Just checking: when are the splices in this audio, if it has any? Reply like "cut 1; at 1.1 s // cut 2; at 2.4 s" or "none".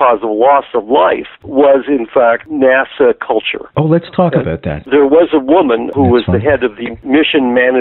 cut 1; at 4.7 s // cut 2; at 5.9 s